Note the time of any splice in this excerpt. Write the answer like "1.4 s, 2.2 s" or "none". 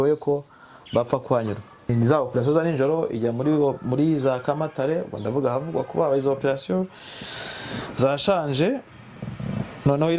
1.9 s